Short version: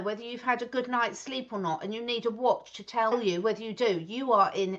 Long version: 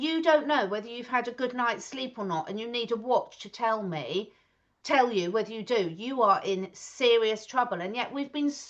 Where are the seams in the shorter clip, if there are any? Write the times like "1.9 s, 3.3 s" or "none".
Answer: 3.1 s